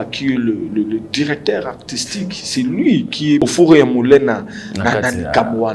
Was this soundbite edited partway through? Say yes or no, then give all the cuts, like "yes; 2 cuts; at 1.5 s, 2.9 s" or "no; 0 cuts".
yes; 1 cut; at 3.4 s